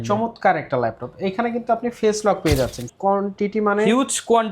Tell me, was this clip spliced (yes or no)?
yes